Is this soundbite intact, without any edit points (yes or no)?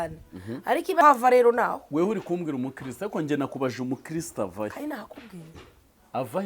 no